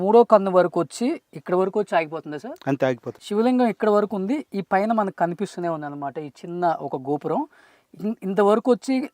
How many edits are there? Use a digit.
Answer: 1